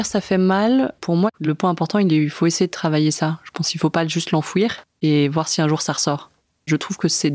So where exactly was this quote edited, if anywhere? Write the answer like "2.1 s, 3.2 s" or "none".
1.3 s, 4.8 s, 6.7 s